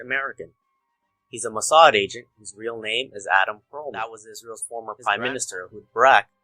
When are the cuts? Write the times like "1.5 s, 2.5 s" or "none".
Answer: 4.0 s